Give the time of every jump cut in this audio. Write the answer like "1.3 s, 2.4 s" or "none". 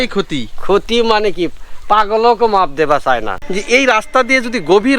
3.4 s